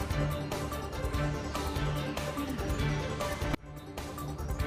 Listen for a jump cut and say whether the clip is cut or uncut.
uncut